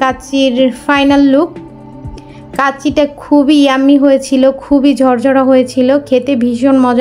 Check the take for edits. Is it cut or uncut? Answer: uncut